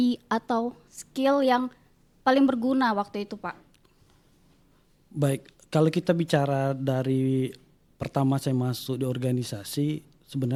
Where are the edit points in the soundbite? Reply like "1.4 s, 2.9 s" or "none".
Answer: none

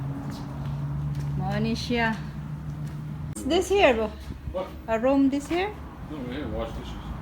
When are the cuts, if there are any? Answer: 3.4 s

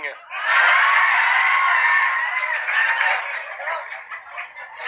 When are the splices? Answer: none

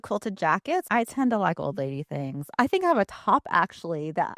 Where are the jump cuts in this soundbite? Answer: 0.9 s, 2.5 s

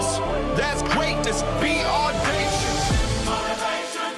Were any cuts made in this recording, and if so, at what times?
none

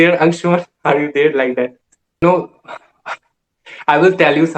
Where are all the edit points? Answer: 2.2 s

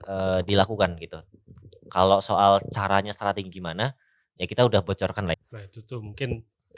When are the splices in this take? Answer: 5.3 s

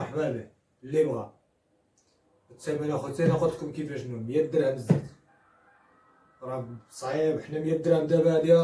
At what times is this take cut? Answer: none

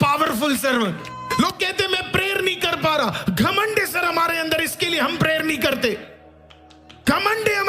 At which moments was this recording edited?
1.1 s

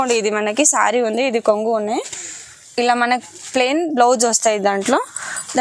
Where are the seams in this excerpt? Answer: none

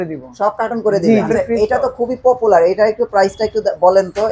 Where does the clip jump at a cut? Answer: 1.3 s

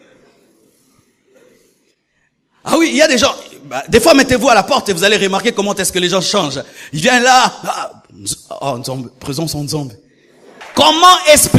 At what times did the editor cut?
10.6 s

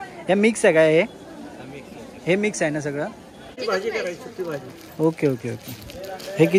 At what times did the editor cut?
3.5 s

